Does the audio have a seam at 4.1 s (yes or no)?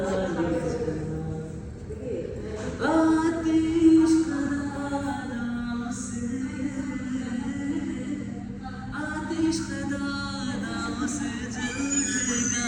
no